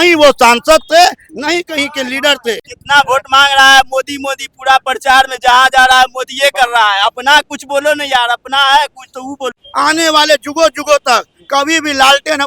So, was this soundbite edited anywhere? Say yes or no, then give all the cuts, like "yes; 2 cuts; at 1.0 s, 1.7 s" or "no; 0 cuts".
yes; 2 cuts; at 2.7 s, 9.6 s